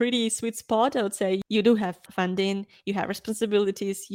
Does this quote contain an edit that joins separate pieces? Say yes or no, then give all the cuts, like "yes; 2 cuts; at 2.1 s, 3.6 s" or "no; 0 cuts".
yes; 1 cut; at 1.4 s